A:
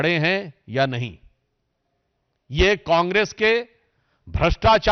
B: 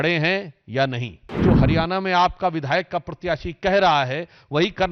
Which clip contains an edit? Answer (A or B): B